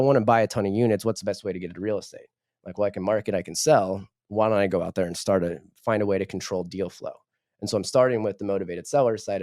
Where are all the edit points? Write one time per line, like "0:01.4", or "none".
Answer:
none